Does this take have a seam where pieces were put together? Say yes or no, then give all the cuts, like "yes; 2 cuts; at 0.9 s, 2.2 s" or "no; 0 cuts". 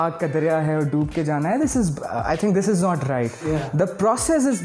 no; 0 cuts